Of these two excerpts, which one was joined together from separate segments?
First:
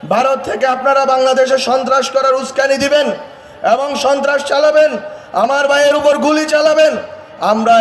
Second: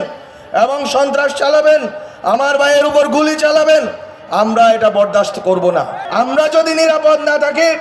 second; 1 cut; at 6.0 s

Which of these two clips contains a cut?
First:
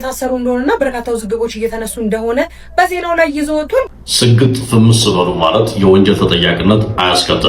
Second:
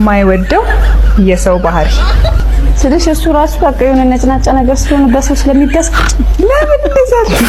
first; 1 cut; at 3.8 s

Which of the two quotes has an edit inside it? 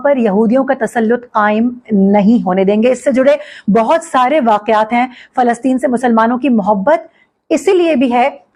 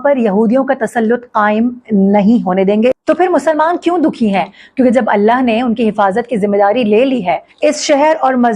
second; 2 cuts; at 3.0 s, 7.5 s

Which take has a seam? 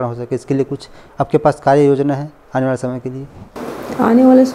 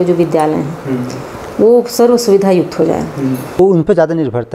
second; 1 cut; at 3.6 s

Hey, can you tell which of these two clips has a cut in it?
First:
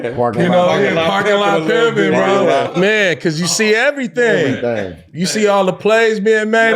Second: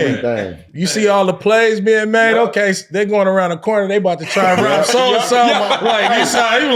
first; 1 cut; at 2.7 s

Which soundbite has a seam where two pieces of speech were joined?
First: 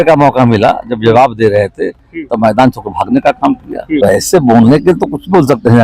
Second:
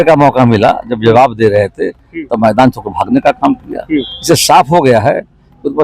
first; 1 cut; at 4.0 s

